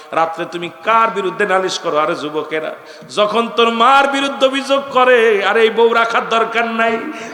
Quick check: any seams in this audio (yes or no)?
no